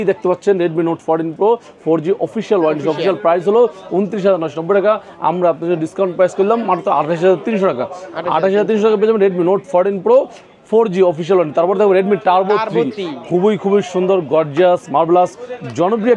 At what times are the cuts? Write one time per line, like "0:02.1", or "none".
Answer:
none